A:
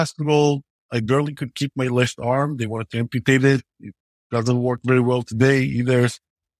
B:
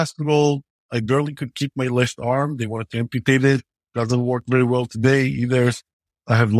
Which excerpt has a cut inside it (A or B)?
B